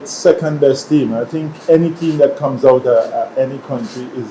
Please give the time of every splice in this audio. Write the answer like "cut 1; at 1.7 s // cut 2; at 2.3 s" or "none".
none